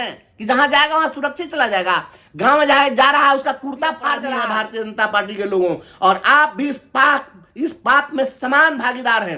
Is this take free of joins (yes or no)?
no